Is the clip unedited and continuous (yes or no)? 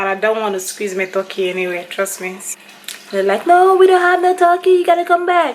no